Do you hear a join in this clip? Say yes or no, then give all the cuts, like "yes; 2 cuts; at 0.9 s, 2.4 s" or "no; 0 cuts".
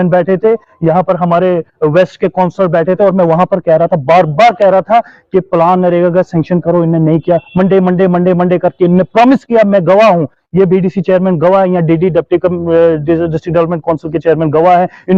no; 0 cuts